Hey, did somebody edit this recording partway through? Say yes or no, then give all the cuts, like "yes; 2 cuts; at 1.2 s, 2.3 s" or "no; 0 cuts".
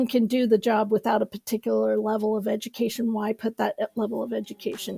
no; 0 cuts